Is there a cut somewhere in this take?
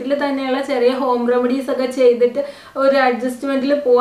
no; 0 cuts

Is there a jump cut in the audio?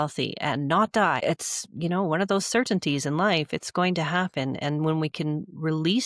yes; 1 cut; at 1.2 s

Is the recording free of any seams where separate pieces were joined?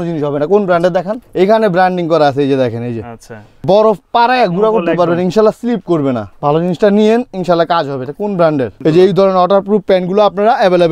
no; 4 cuts; at 1.2 s, 3.6 s, 6.3 s, 8.7 s

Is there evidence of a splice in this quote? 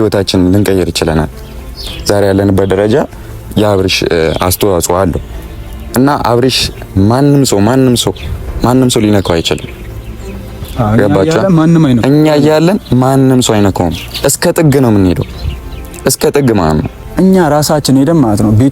yes; 1 cut; at 17.0 s

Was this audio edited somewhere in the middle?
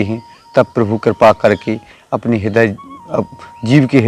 no; 0 cuts

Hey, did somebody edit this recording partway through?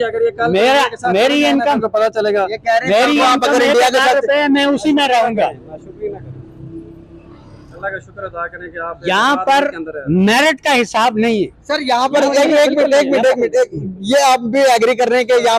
no; 0 cuts

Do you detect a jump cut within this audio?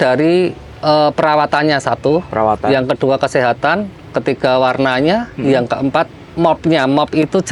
no; 0 cuts

